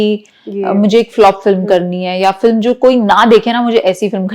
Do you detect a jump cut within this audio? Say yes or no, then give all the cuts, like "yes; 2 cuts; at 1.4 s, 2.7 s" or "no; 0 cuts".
no; 0 cuts